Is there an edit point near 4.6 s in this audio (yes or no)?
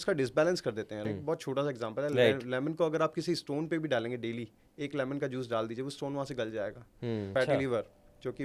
no